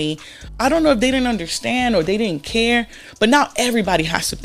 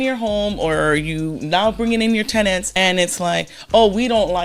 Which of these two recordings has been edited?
second; 1 cut; at 2.7 s

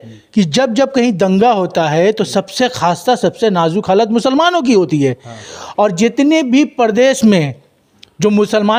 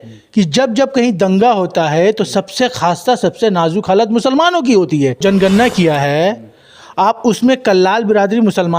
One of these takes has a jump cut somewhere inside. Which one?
second; 1 cut; at 5.2 s

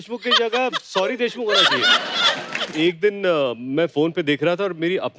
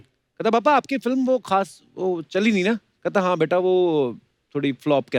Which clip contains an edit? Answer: first; 1 cut; at 2.7 s

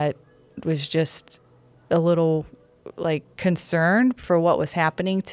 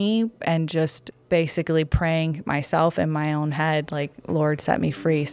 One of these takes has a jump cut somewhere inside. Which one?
second; 1 cut; at 1.1 s

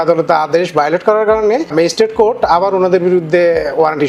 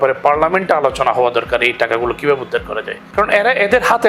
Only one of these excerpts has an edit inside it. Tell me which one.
first; 1 cut; at 1.7 s

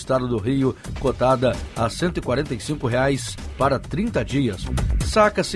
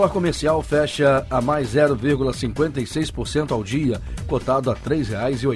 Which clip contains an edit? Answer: first; 1 cut; at 4.6 s

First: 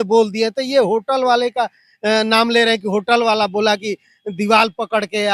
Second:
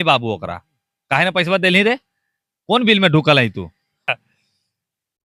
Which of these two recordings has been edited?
second; 1 cut; at 4.1 s

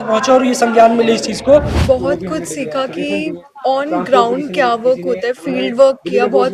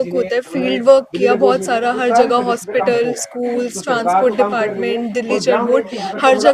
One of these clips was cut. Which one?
first; 1 cut; at 1.7 s

